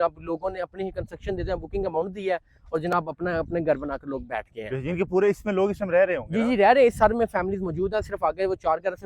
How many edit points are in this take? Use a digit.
0